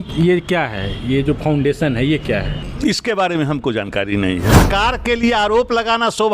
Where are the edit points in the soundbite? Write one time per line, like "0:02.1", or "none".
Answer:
0:02.6
0:04.6